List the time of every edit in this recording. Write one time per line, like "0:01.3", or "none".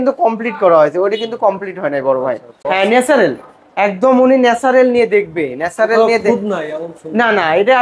0:02.5